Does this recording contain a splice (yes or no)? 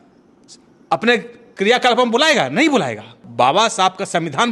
yes